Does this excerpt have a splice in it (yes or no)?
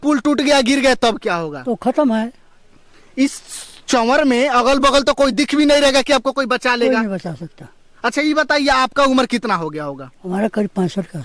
no